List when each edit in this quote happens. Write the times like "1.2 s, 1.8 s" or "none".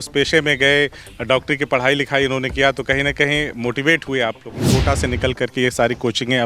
4.7 s